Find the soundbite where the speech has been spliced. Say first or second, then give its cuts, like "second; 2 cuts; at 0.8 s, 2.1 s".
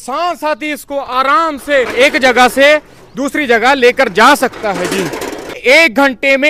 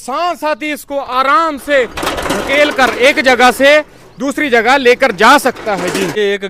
first; 2 cuts; at 1.9 s, 5.5 s